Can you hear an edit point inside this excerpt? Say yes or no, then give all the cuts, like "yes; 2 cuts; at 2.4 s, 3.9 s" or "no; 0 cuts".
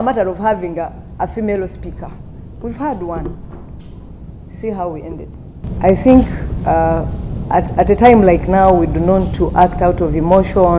yes; 1 cut; at 5.7 s